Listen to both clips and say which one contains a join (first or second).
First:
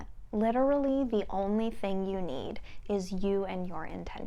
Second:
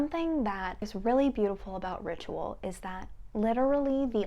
second